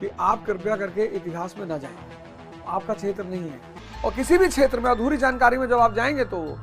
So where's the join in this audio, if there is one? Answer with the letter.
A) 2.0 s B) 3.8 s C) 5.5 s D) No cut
B